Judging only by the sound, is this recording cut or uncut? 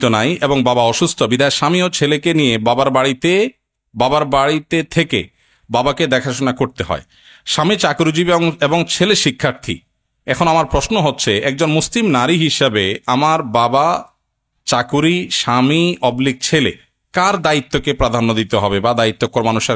uncut